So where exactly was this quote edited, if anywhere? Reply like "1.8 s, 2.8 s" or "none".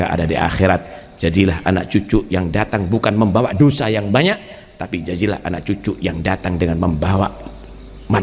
none